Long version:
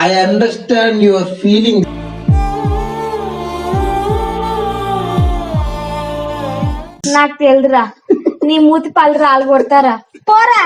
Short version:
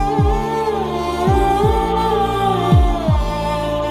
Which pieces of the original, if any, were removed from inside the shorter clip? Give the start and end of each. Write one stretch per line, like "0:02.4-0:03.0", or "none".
none